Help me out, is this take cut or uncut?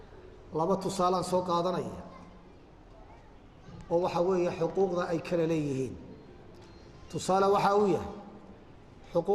uncut